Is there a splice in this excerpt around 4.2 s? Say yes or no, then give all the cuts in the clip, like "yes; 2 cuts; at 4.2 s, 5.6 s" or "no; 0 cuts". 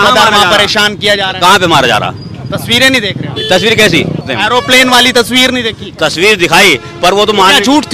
yes; 1 cut; at 4.2 s